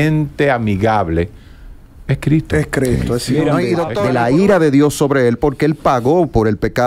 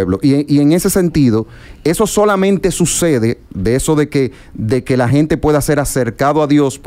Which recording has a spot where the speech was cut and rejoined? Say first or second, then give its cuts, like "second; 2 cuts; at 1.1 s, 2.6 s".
first; 1 cut; at 3.9 s